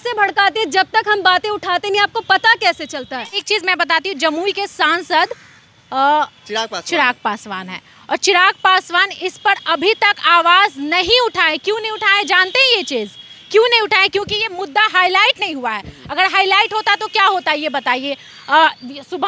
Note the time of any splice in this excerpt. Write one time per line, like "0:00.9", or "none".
0:03.4